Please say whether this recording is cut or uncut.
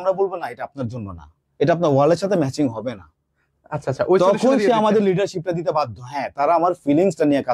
uncut